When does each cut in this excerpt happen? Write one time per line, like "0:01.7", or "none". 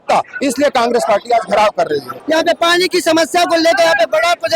0:02.2